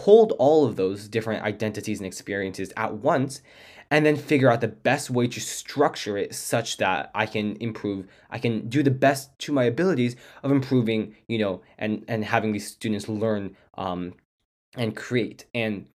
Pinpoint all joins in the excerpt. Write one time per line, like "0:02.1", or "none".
none